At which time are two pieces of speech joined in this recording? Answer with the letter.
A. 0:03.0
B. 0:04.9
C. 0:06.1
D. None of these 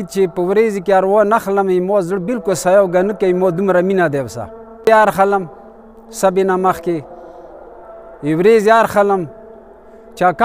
B